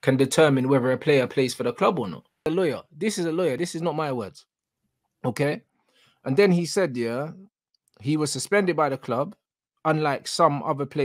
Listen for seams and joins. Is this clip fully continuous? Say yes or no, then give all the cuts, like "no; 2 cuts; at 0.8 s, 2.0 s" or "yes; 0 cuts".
no; 1 cut; at 2.5 s